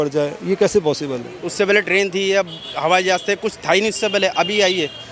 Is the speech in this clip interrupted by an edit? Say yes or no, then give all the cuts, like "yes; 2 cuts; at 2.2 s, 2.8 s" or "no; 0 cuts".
yes; 1 cut; at 1.3 s